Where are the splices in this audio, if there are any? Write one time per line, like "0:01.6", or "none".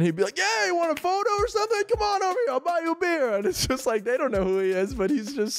none